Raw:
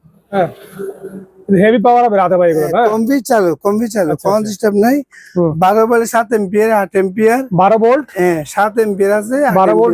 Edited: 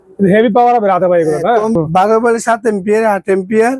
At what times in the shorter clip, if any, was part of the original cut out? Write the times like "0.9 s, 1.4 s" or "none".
1.8 s

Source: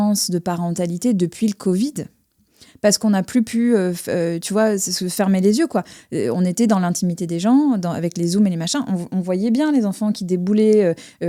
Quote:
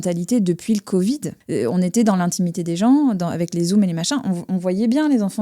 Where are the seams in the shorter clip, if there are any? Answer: 1.4 s

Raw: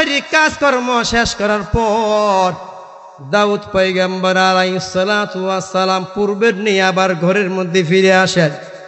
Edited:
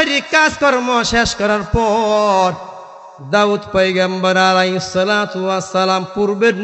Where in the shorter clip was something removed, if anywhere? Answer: none

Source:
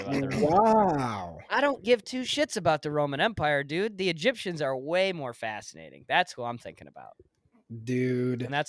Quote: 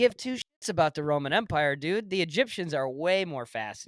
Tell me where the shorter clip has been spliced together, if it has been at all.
none

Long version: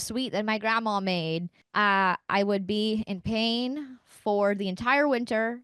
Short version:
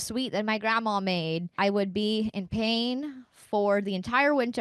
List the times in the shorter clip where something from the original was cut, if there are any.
1.5 s

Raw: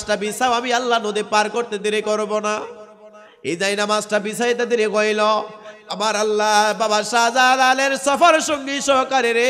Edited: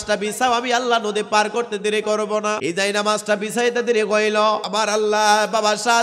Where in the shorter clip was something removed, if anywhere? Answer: 2.6 s, 4.6 s

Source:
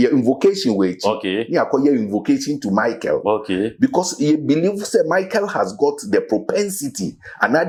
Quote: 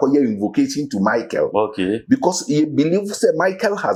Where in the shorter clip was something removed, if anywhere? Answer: none

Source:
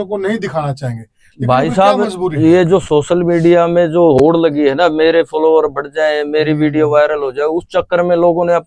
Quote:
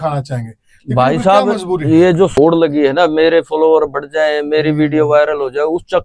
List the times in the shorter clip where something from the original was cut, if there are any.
2.4 s

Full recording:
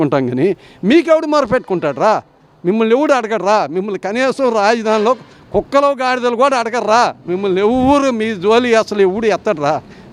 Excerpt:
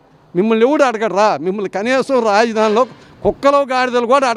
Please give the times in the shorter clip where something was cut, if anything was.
none

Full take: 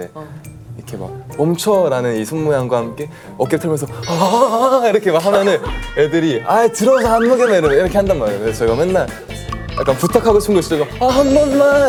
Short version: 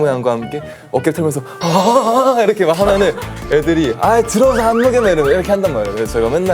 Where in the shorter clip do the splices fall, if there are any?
none

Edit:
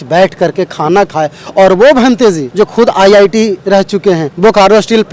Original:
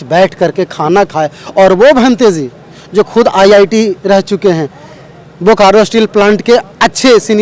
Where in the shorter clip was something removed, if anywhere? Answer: 2.4 s, 4.3 s

